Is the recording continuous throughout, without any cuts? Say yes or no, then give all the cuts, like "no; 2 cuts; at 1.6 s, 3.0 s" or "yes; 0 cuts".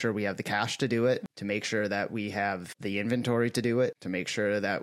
no; 3 cuts; at 1.3 s, 2.7 s, 4.0 s